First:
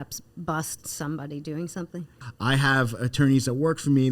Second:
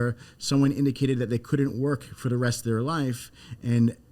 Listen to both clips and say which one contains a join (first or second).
first